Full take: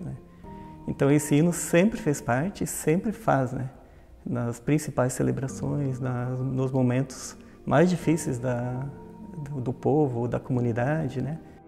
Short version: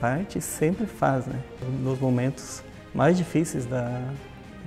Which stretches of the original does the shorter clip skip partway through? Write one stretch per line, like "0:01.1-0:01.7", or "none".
0:03.9-0:06.3